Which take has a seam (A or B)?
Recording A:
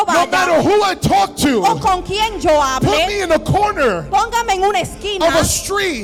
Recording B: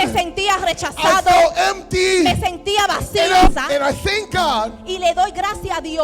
B